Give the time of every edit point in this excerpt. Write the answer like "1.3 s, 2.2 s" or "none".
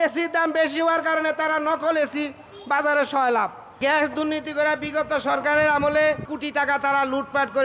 6.3 s